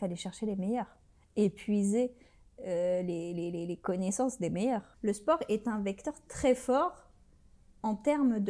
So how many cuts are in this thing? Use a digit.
1